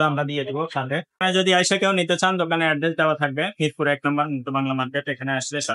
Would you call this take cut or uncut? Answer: cut